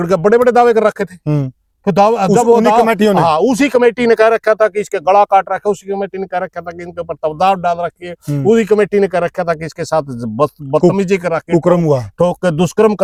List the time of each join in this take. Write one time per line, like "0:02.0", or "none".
none